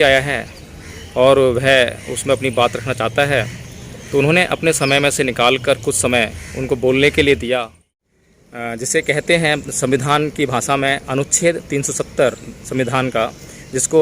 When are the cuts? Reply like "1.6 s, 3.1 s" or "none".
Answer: 7.9 s